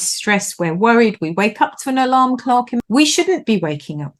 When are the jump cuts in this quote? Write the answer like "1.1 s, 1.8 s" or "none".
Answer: 2.8 s